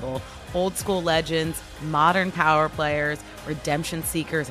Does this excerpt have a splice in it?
no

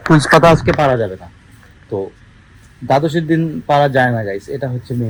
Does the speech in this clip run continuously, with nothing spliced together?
yes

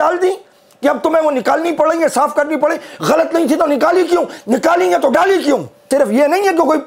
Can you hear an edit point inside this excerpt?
yes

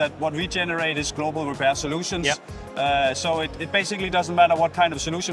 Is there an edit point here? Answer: no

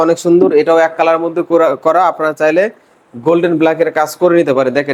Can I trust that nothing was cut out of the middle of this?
yes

